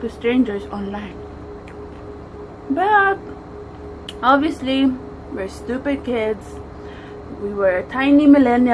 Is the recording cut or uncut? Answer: uncut